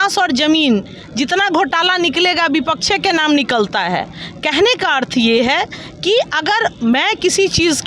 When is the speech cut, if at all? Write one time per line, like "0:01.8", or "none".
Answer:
none